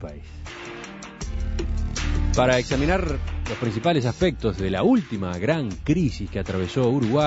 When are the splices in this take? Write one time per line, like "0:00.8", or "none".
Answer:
0:02.2